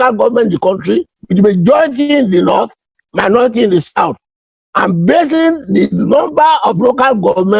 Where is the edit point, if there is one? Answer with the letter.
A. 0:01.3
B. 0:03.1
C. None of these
C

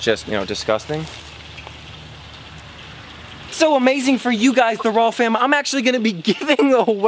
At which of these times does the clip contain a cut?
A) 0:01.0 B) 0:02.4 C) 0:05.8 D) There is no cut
D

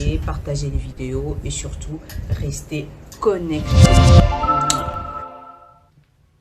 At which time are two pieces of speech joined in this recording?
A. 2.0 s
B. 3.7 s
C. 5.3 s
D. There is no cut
B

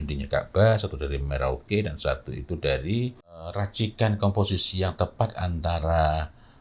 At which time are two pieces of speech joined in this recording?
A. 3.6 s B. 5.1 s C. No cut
A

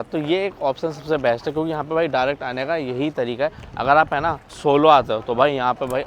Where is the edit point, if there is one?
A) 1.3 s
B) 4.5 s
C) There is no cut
B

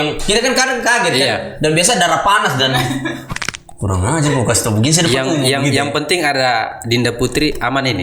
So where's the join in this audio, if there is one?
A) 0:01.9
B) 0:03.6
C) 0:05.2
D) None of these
D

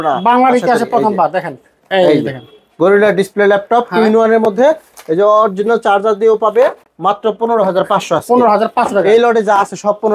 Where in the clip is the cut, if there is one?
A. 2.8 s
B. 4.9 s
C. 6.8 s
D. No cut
D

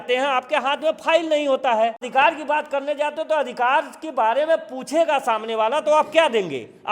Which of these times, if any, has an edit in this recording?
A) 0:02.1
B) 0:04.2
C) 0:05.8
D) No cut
A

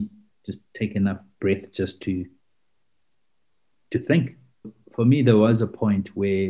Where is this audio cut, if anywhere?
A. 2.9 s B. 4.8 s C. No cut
B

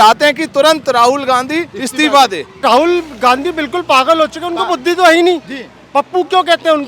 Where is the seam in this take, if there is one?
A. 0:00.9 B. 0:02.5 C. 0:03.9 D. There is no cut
B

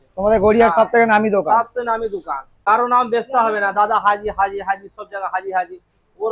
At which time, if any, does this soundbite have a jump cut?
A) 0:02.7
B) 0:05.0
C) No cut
A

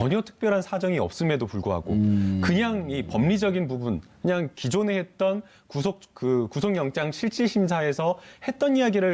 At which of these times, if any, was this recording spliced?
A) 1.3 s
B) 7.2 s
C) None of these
A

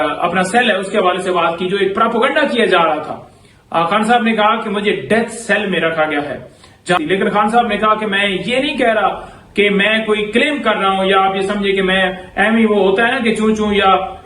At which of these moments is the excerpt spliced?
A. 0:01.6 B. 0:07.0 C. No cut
B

